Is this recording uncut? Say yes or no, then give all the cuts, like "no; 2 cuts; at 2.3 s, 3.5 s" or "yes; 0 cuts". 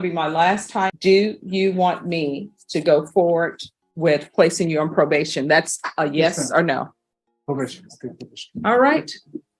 no; 1 cut; at 1.0 s